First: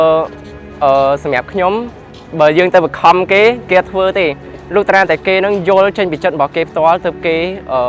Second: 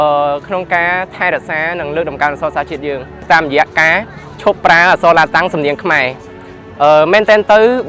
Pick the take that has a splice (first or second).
second